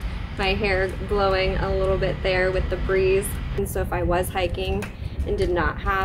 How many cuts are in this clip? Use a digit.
1